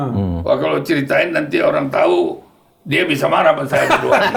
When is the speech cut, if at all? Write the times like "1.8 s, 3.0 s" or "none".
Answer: none